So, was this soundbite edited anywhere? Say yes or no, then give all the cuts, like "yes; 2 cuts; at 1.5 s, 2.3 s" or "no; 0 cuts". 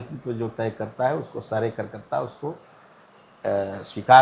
no; 0 cuts